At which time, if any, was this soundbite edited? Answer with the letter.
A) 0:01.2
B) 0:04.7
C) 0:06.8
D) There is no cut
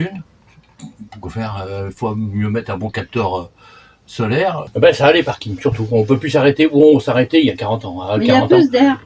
B